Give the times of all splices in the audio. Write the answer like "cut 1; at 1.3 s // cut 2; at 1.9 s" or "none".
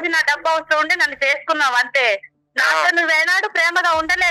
none